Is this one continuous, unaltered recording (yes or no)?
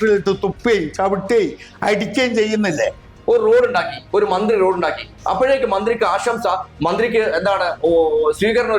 no